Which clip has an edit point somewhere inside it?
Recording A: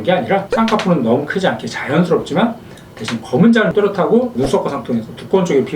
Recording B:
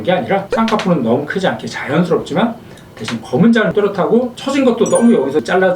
A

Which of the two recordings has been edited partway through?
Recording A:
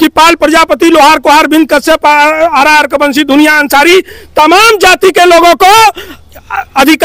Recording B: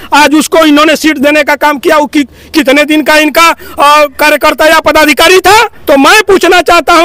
B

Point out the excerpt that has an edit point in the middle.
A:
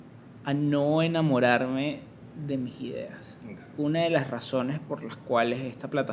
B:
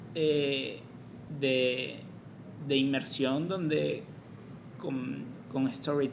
A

